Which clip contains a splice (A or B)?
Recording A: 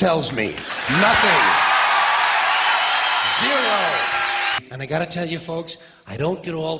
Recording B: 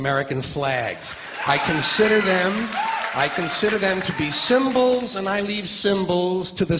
A